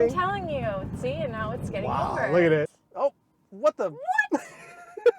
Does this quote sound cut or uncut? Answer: cut